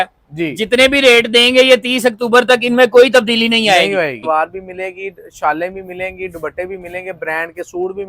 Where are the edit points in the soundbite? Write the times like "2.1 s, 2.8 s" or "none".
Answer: 4.2 s